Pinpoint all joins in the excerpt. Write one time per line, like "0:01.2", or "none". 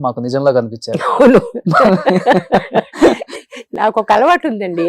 none

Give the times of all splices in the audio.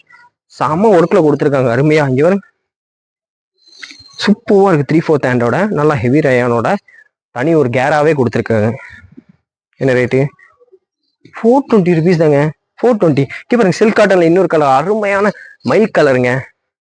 none

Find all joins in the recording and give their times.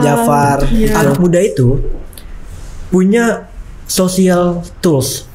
0:01.2

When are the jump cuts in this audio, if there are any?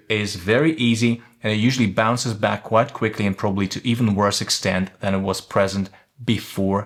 none

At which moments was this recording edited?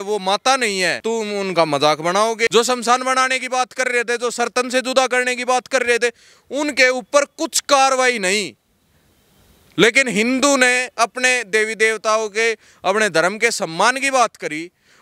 0:01.0
0:02.5

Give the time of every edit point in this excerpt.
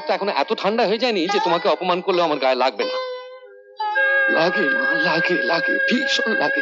none

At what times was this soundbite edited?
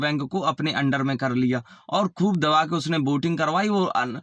none

